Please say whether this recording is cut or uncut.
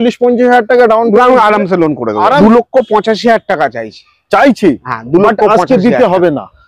cut